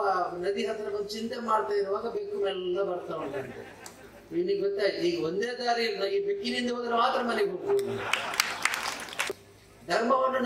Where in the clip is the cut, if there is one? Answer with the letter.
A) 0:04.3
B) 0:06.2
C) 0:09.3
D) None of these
C